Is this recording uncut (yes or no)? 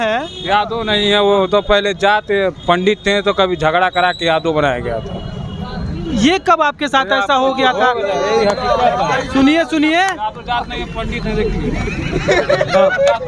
yes